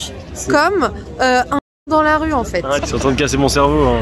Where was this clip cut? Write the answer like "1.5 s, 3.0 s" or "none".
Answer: 2.8 s